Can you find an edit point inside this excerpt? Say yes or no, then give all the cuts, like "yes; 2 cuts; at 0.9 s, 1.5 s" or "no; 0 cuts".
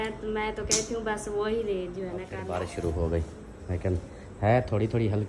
yes; 1 cut; at 2.3 s